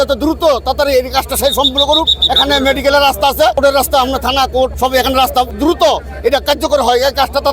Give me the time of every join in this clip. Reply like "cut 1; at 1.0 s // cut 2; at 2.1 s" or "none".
cut 1; at 3.6 s // cut 2; at 4.7 s // cut 3; at 5.5 s